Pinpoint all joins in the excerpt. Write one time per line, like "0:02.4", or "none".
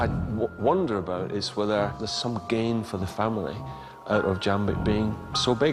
0:02.1